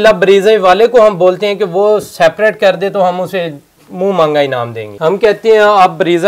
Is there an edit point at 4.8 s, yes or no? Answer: yes